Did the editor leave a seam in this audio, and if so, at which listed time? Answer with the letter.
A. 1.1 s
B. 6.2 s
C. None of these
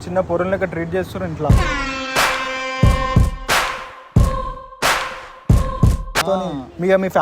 B